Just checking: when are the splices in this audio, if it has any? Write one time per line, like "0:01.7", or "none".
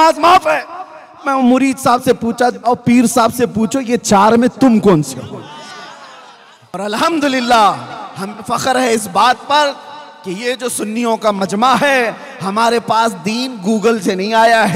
0:06.7